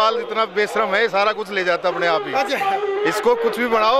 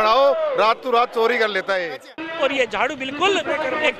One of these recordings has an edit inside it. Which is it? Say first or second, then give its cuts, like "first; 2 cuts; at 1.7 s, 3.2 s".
second; 1 cut; at 2.1 s